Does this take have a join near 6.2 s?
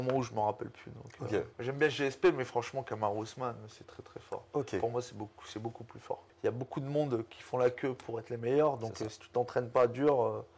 yes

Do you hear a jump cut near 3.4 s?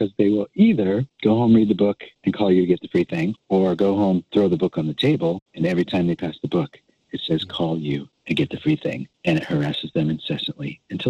yes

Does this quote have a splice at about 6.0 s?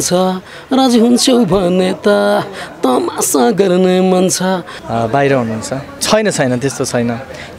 yes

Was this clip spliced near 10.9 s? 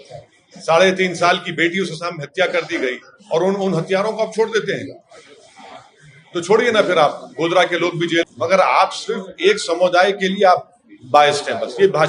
no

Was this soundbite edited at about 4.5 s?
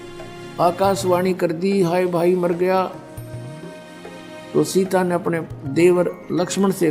yes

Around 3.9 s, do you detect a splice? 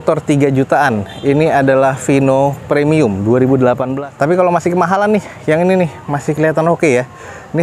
yes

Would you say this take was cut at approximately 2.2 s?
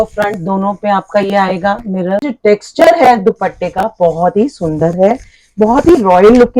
yes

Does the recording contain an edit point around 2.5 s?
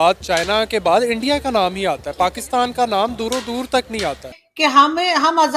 no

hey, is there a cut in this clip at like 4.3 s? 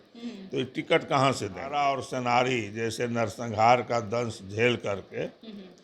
no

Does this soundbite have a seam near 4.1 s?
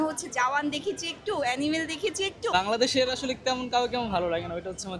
no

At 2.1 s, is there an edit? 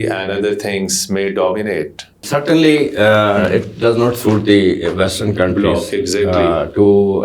yes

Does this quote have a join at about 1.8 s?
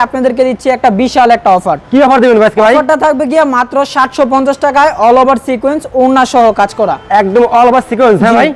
no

